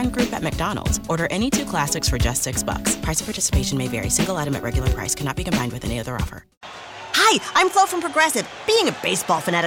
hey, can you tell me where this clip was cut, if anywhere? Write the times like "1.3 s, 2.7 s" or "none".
6.5 s